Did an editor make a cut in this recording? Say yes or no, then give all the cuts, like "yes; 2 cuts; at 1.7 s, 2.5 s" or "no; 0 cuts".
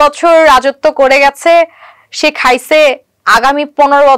no; 0 cuts